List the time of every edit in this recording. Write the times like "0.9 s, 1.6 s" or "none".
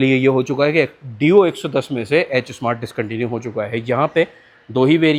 none